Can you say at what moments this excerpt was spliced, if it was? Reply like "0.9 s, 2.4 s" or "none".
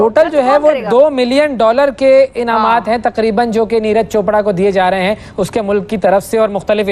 none

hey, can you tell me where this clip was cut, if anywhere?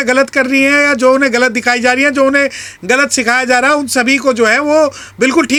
none

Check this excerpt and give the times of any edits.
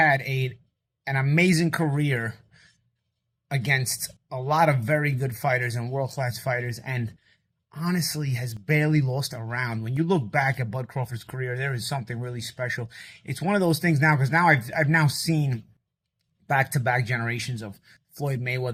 none

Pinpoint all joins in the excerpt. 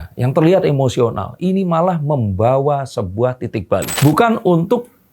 3.9 s

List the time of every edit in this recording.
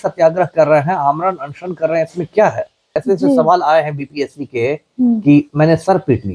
2.8 s

